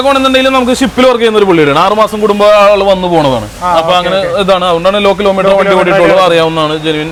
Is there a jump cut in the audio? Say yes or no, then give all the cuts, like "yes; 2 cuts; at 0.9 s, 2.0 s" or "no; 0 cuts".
no; 0 cuts